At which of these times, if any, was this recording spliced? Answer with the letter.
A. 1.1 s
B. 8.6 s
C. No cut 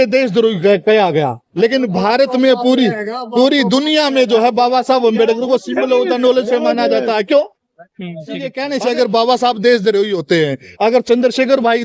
B